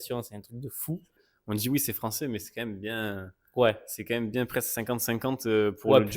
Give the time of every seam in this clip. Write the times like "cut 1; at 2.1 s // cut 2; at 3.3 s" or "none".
cut 1; at 1.3 s